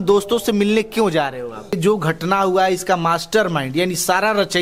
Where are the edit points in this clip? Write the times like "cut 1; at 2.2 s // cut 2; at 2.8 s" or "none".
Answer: cut 1; at 1.8 s